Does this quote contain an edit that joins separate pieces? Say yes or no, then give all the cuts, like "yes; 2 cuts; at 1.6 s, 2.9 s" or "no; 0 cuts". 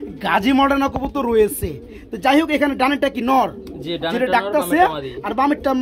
no; 0 cuts